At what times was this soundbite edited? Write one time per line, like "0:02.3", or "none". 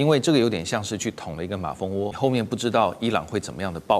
0:02.1

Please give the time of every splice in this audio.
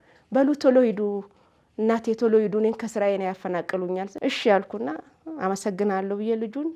0:04.1

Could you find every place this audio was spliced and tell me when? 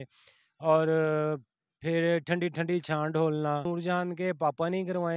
0:03.6

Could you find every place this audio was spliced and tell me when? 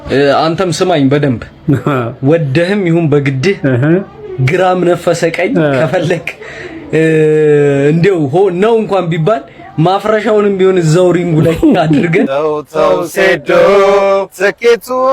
0:12.3

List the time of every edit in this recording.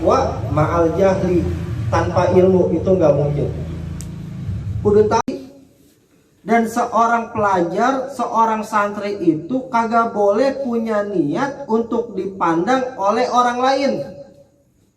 0:05.2

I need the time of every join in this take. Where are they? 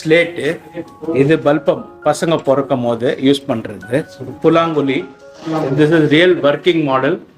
0:04.2

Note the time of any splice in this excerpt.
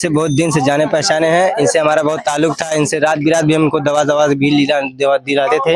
none

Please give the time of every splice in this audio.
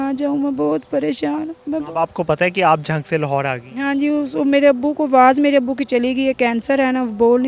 none

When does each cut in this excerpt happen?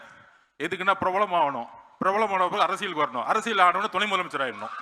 none

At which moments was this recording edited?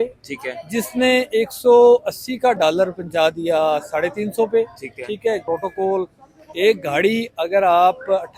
0:05.4

